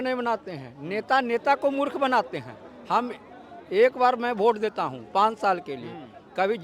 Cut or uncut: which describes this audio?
uncut